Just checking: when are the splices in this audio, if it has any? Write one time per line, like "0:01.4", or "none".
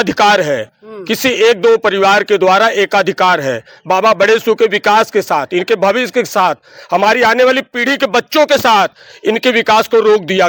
none